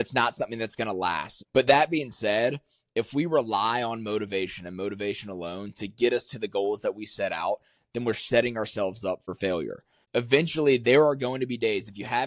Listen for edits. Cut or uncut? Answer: cut